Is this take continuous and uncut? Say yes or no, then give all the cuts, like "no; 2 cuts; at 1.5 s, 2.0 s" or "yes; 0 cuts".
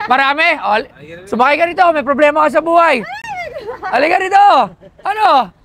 yes; 0 cuts